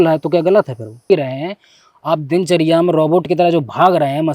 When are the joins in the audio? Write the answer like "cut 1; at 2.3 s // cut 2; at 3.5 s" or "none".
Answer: cut 1; at 1.1 s